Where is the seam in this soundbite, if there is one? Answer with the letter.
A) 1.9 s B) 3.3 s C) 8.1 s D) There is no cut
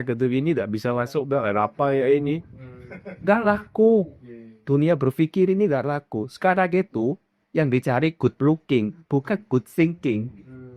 D